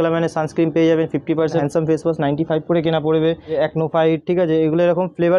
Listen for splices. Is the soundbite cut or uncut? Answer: cut